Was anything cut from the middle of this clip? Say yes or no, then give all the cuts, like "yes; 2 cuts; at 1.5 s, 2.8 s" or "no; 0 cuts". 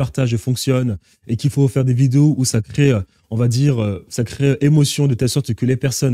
no; 0 cuts